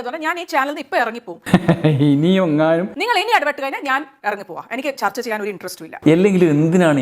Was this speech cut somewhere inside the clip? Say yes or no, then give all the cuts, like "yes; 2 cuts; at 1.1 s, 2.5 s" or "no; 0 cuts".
yes; 2 cuts; at 2.9 s, 5.9 s